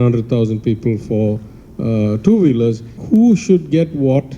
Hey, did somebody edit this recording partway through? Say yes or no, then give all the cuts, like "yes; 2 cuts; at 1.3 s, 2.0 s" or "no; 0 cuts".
yes; 1 cut; at 2.9 s